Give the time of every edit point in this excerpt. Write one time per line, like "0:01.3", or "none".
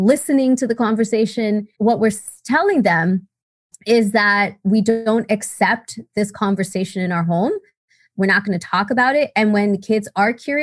0:01.7